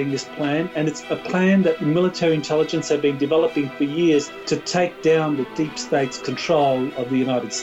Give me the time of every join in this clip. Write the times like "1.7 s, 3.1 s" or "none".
1.0 s, 1.8 s, 4.4 s